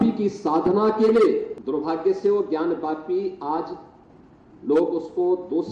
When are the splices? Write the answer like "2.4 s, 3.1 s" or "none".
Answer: 1.6 s